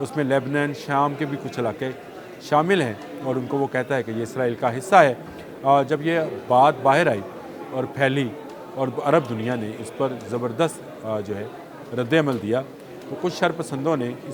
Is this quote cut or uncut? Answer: uncut